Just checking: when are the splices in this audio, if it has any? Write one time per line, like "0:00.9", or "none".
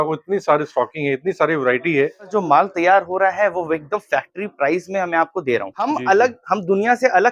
0:02.3
0:05.9